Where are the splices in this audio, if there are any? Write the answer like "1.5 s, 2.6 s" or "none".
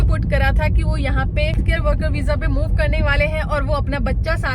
1.6 s